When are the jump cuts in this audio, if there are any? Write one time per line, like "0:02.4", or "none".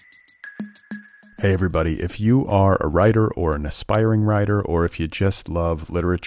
0:00.9